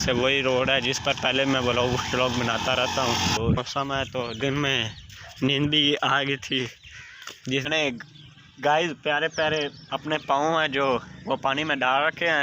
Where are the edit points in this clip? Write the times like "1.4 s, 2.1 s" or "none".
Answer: 3.5 s, 7.7 s

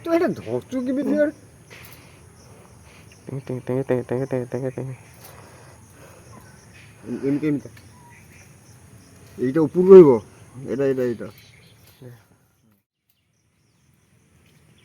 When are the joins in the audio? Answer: 12.5 s

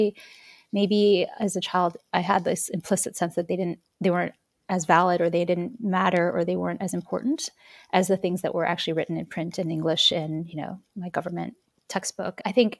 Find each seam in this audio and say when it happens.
none

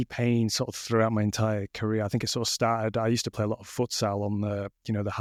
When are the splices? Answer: none

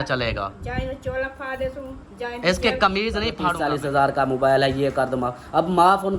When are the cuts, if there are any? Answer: 3.5 s

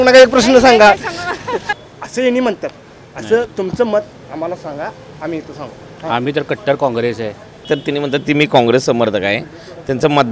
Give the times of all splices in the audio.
1.7 s, 7.6 s

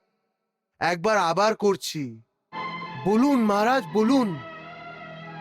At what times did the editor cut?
2.7 s

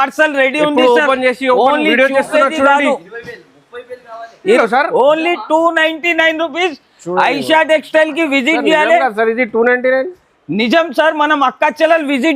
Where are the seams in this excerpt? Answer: 4.6 s

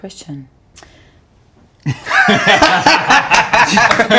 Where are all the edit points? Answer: none

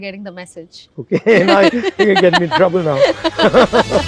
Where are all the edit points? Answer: none

